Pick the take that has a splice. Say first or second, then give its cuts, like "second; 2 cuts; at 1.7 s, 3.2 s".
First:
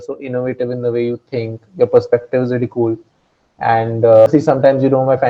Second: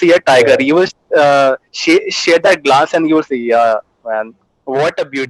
first; 1 cut; at 4.3 s